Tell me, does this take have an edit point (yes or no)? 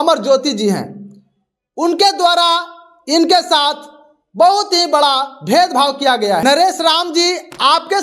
yes